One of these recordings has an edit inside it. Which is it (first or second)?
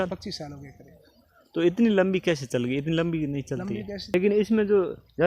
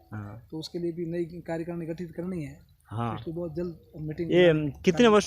first